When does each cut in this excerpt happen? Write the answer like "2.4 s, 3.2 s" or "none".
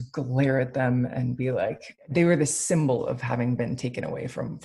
1.9 s